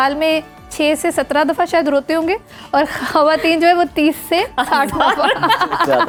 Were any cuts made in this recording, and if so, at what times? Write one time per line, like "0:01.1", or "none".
none